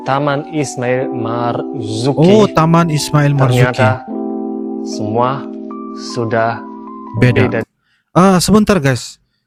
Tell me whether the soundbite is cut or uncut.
uncut